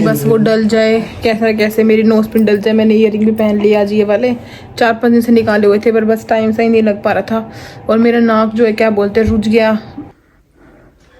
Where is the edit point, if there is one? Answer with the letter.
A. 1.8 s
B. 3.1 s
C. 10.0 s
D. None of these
C